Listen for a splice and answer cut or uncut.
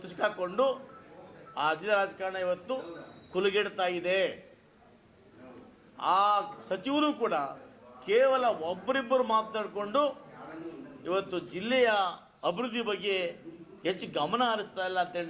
uncut